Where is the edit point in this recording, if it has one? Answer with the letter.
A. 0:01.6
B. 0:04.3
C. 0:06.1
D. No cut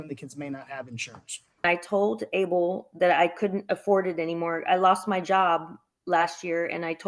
A